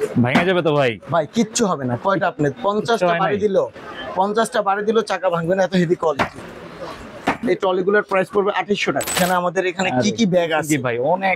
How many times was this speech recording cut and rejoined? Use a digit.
2